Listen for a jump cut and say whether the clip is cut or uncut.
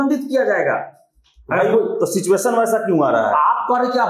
uncut